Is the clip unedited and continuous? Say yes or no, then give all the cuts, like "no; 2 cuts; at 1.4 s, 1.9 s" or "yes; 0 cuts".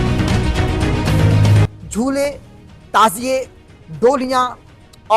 no; 1 cut; at 1.7 s